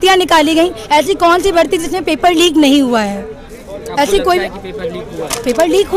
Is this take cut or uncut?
uncut